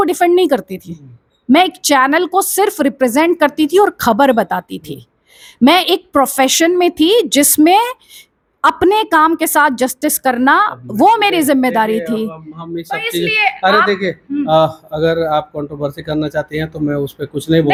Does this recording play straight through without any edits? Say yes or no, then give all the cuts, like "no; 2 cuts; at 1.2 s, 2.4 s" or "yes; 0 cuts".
yes; 0 cuts